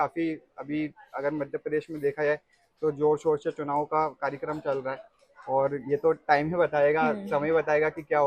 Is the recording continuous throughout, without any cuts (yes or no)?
yes